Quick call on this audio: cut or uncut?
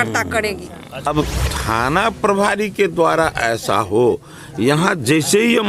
cut